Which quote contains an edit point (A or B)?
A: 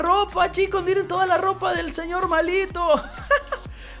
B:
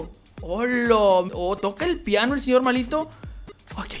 B